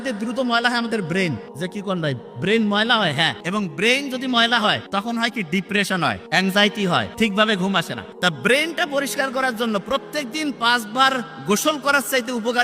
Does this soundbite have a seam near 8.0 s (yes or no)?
yes